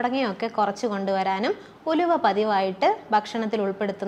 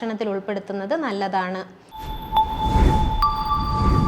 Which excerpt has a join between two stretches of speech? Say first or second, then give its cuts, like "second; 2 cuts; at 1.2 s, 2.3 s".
second; 1 cut; at 1.9 s